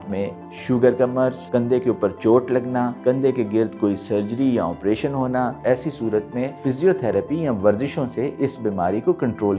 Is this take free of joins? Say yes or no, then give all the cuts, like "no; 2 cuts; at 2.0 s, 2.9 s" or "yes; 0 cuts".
no; 4 cuts; at 1.4 s, 2.9 s, 5.6 s, 6.5 s